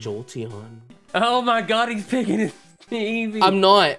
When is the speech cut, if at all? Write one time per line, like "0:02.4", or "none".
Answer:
0:00.9